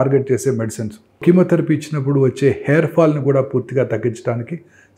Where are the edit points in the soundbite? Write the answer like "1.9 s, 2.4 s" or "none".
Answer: 1.2 s

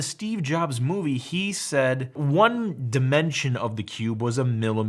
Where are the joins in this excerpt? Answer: 2.2 s

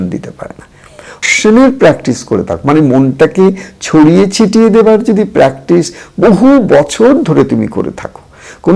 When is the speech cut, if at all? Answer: 1.2 s

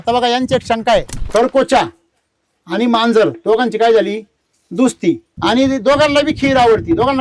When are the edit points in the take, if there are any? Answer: 1.2 s, 5.3 s

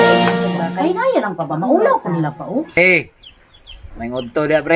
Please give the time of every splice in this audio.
2.7 s

